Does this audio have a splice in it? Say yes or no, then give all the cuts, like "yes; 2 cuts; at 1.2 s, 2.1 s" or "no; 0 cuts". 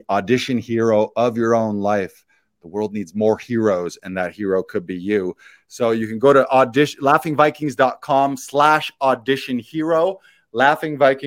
no; 0 cuts